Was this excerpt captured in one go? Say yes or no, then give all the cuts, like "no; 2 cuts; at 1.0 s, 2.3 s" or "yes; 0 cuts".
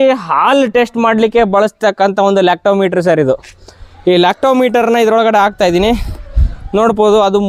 yes; 0 cuts